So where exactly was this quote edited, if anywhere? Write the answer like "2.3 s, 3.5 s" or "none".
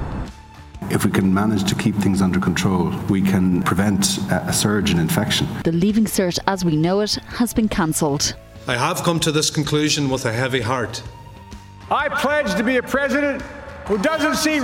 5.5 s, 11.4 s, 13.7 s